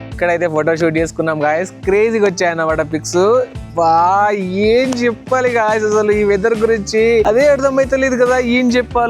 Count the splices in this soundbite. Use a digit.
0